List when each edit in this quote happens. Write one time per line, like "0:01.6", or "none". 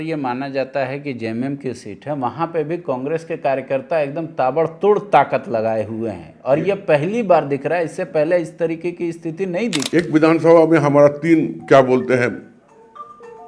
0:09.9